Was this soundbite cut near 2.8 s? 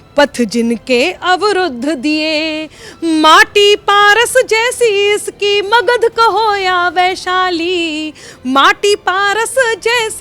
no; 0 cuts

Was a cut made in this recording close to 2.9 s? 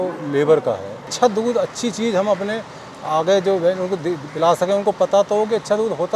no; 1 cut; at 1.1 s

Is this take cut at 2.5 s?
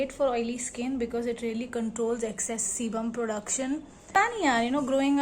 no; 1 cut; at 3.9 s

